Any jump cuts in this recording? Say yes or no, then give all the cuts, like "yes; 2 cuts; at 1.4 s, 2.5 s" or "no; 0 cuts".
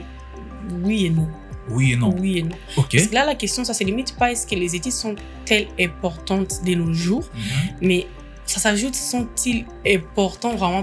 no; 0 cuts